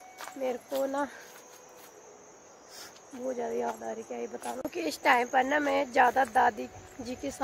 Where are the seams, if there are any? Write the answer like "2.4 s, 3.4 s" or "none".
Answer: 4.6 s